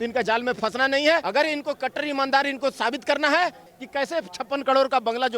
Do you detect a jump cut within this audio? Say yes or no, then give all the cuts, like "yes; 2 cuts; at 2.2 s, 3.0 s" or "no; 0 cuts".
yes; 2 cuts; at 1.3 s, 3.7 s